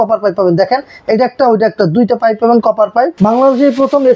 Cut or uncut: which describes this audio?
cut